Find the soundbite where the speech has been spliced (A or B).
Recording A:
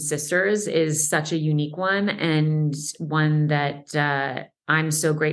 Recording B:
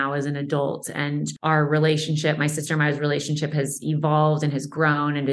B